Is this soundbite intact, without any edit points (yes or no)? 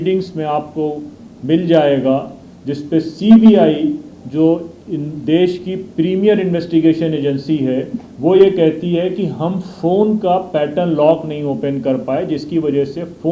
yes